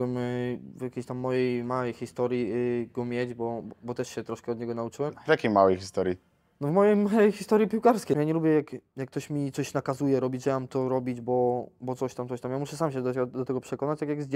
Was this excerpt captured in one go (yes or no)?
no